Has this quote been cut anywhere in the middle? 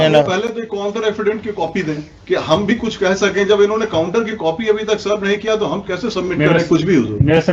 no; 0 cuts

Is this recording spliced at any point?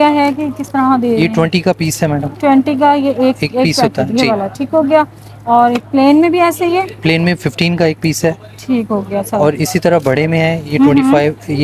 no; 0 cuts

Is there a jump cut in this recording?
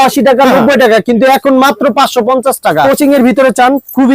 yes; 1 cut; at 2.8 s

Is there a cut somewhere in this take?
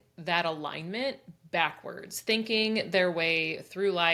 no; 0 cuts

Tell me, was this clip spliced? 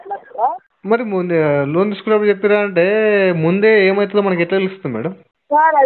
no; 0 cuts

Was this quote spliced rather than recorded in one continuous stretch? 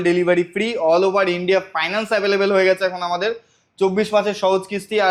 no; 0 cuts

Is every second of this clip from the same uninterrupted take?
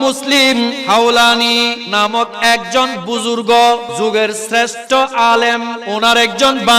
no; 4 cuts; at 0.8 s, 1.8 s, 3.9 s, 5.8 s

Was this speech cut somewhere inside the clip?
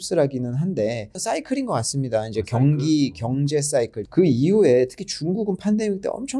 yes; 2 cuts; at 1.1 s, 4.0 s

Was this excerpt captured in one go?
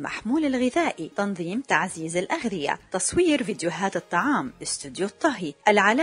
yes; 0 cuts

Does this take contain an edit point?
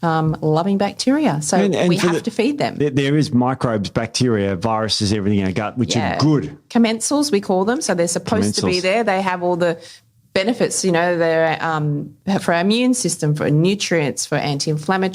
yes; 1 cut; at 2.8 s

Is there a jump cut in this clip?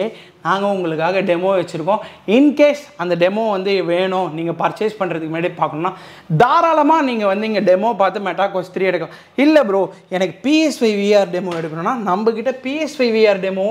no; 0 cuts

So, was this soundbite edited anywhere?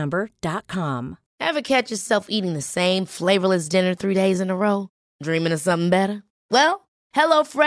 yes; 1 cut; at 1.2 s

